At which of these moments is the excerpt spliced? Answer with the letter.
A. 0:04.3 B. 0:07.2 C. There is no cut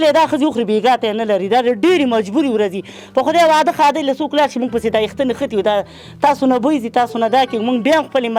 C